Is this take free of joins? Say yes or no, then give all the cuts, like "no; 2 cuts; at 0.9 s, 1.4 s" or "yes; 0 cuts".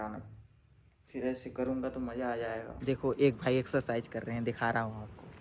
no; 1 cut; at 2.7 s